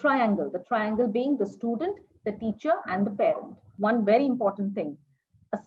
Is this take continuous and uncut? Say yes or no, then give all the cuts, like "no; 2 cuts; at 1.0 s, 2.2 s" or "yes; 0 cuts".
no; 1 cut; at 3.7 s